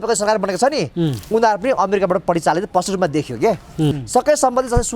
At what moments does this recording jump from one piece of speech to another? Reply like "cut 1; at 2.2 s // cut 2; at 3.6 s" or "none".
cut 1; at 4.0 s